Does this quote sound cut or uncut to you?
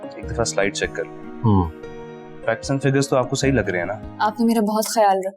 cut